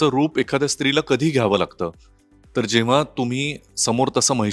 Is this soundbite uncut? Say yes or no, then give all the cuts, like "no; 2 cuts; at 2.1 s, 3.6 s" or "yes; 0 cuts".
yes; 0 cuts